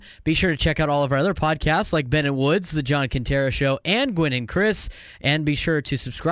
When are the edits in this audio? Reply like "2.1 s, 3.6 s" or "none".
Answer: none